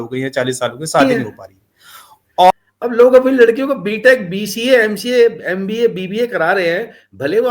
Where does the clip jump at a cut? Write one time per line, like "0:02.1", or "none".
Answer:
0:02.5